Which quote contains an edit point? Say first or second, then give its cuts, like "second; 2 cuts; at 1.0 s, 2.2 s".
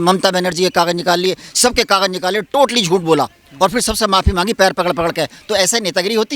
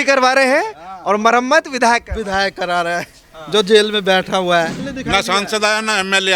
second; 1 cut; at 4.8 s